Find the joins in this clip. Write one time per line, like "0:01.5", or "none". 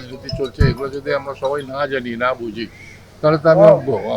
none